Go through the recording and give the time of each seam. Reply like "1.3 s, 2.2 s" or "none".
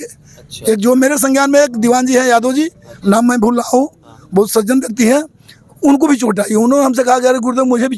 none

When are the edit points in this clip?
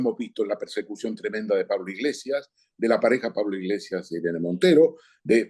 none

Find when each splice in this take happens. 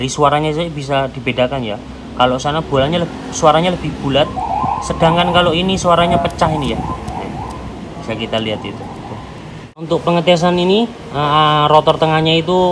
9.8 s

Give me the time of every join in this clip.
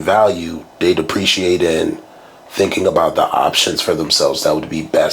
none

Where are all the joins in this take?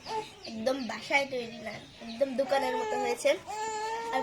none

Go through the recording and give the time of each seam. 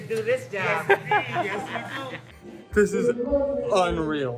2.3 s

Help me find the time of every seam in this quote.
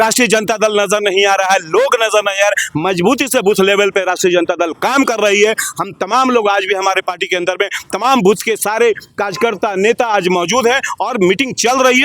none

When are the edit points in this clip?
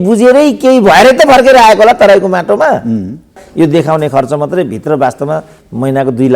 3.4 s

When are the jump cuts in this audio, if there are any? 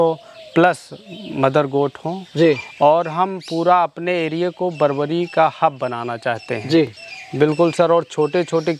none

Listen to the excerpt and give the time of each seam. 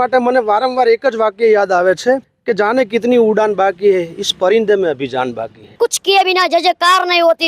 2.4 s, 5.6 s

